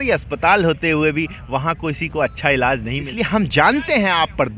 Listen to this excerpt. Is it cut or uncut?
cut